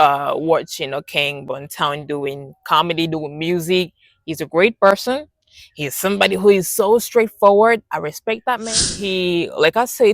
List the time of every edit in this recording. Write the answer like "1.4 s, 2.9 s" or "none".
9.0 s